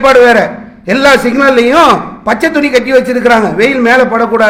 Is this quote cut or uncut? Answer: uncut